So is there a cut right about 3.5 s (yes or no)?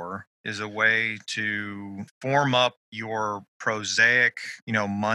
no